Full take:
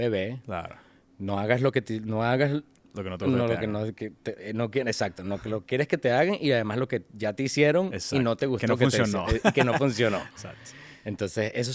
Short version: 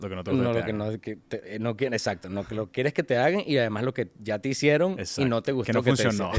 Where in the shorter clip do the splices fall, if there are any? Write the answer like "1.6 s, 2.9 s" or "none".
none

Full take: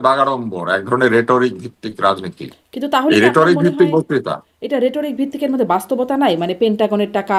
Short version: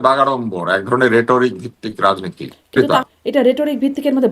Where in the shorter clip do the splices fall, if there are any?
2.7 s

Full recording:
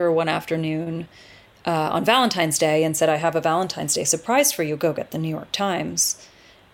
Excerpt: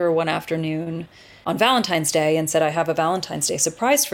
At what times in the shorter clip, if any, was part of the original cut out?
1.4 s

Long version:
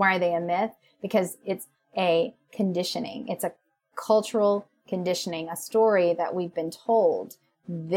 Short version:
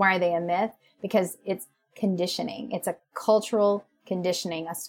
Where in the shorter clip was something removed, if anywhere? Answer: 1.8 s, 3.1 s

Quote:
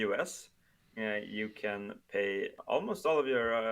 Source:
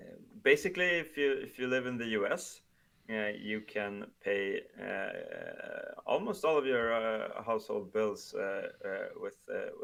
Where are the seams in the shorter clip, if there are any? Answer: 2.6 s

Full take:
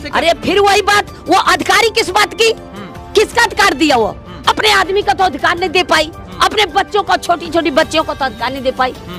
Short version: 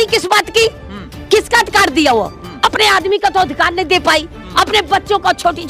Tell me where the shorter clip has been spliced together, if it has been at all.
none

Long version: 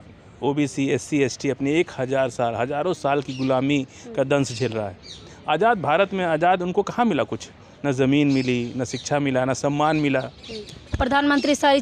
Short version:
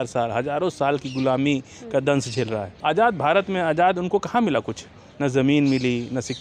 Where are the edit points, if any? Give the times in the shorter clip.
2.7 s

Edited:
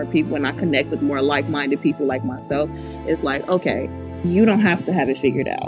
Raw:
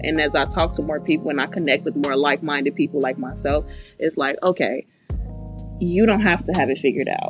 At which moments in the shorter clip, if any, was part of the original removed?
4.1 s

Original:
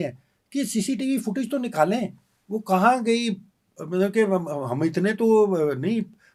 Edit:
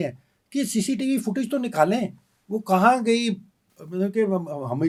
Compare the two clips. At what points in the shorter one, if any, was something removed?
none

